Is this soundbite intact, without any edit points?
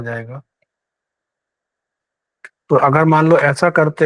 no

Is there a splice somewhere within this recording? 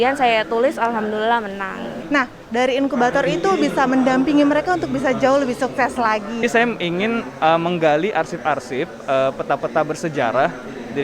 yes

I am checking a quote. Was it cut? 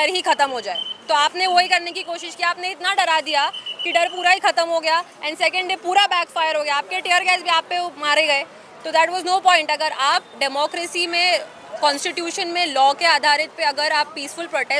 no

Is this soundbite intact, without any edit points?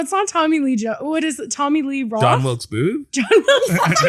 yes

